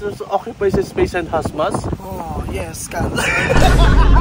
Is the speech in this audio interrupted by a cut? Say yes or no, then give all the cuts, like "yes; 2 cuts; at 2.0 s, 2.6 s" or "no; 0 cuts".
no; 0 cuts